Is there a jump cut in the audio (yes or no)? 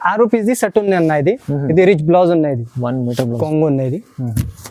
yes